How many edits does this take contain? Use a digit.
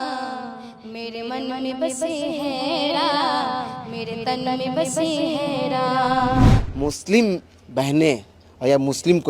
1